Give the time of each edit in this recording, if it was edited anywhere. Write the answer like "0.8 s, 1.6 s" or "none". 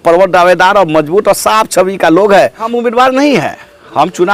2.7 s